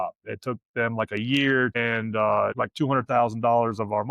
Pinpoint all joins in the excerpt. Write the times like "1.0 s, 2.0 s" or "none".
1.7 s, 2.5 s